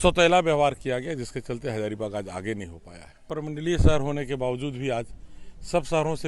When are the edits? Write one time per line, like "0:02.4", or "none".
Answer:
0:03.3